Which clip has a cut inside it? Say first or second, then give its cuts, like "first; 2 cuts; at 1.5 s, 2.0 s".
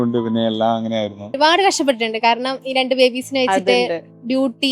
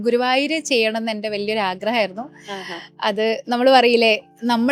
first; 1 cut; at 1.3 s